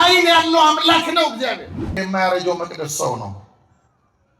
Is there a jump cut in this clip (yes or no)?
yes